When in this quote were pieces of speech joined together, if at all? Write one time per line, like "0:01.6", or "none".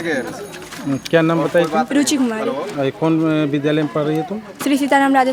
none